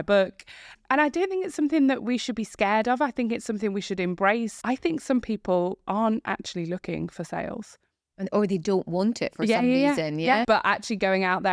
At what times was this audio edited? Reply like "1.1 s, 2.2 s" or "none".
4.5 s, 10.4 s